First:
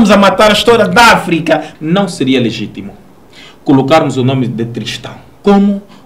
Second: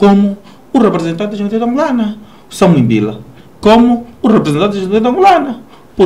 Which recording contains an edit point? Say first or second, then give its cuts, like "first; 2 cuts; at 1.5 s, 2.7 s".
first; 1 cut; at 1.7 s